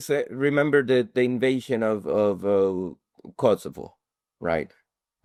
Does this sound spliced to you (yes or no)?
no